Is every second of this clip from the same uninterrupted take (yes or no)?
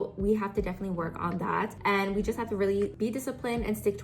yes